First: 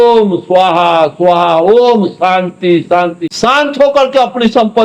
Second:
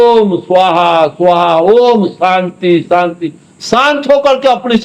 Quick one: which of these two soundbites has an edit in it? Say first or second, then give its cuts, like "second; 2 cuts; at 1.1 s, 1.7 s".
first; 1 cut; at 3.3 s